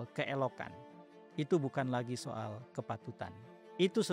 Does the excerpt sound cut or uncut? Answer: uncut